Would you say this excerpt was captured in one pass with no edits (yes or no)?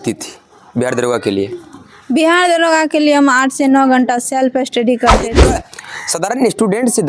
no